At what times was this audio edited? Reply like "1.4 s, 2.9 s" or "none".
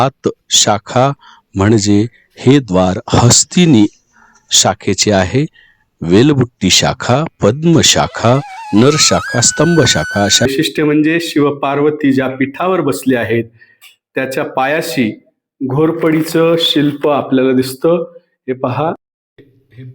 10.4 s

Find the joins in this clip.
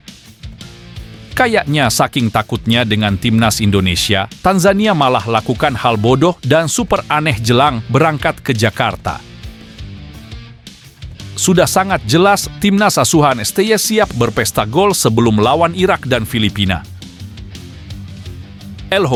none

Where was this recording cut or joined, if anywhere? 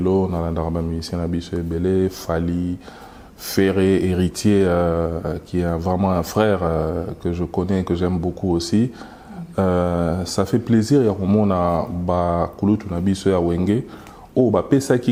none

